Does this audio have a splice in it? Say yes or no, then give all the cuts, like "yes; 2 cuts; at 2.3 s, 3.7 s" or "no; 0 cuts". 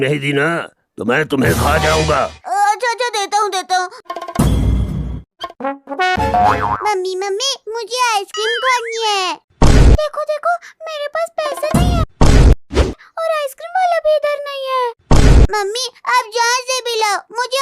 yes; 2 cuts; at 2.4 s, 5.4 s